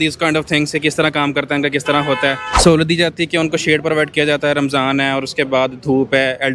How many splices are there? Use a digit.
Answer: 1